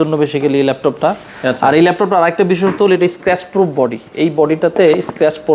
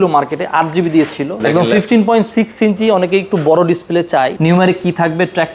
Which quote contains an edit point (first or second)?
second